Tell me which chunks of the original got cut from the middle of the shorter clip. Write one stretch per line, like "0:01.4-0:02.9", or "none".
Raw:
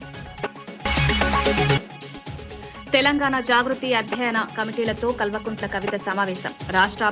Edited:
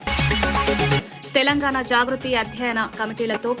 0:02.0-0:02.8